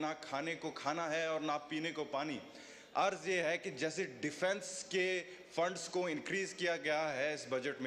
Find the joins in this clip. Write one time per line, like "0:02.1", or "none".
none